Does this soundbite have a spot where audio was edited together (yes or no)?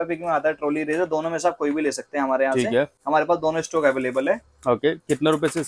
no